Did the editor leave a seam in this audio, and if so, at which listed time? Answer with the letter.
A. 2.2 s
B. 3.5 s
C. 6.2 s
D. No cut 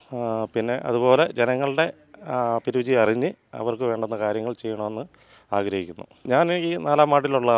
C